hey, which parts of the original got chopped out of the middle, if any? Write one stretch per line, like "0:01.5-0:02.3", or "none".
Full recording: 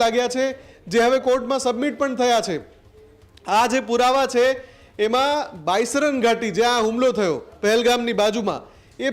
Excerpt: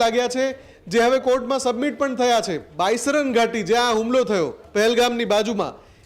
0:02.7-0:05.6